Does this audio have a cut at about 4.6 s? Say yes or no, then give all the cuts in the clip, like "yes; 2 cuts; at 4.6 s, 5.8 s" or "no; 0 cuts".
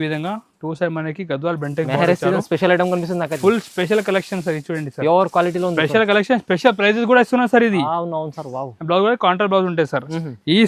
no; 0 cuts